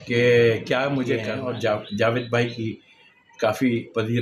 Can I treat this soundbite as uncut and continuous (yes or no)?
no